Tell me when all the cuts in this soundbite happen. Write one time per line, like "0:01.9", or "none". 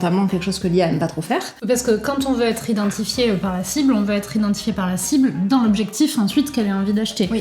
0:01.5